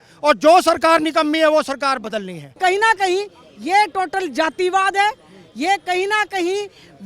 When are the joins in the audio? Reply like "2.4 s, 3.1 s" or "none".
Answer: 2.6 s